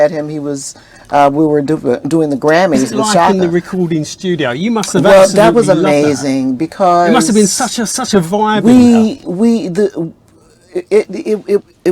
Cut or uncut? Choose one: cut